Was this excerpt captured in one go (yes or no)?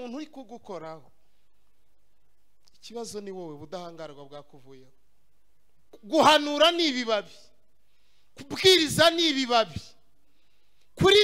no